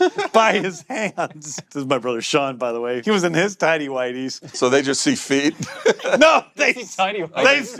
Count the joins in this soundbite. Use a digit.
3